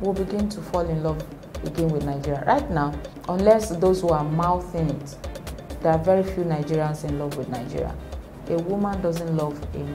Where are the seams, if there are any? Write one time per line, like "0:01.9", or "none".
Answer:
none